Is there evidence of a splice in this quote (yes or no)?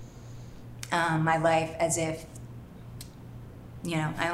no